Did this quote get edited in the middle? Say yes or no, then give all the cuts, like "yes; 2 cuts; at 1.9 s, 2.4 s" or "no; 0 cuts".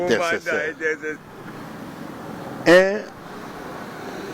yes; 1 cut; at 1.2 s